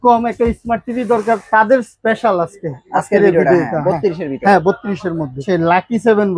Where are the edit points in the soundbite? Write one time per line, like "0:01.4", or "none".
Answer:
0:05.4